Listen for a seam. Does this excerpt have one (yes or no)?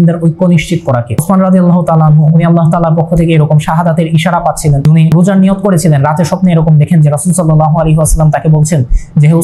yes